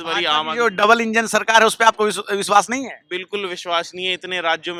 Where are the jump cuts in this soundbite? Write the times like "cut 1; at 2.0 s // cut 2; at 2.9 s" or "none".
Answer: none